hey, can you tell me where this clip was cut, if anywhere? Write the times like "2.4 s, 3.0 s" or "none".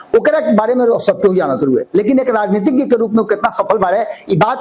none